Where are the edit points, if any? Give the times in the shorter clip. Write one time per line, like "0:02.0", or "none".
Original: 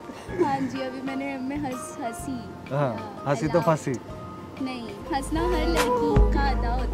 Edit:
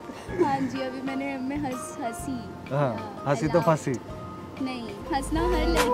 none